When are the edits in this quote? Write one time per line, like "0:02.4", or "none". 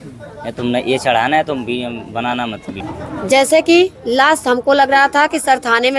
0:02.8